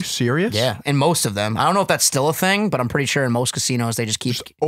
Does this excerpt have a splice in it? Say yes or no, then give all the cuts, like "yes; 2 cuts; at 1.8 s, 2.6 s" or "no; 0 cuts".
no; 0 cuts